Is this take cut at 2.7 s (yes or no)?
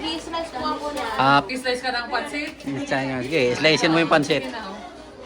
no